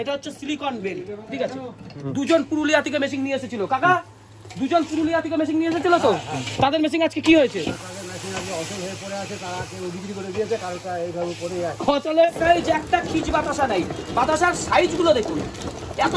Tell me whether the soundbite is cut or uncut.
cut